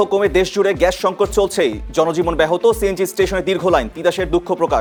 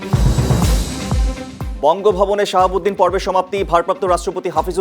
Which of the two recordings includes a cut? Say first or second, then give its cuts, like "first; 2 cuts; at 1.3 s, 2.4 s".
second; 1 cut; at 1.6 s